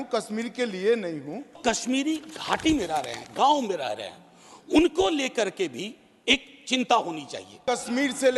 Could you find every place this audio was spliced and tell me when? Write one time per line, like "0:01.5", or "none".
0:01.6
0:07.6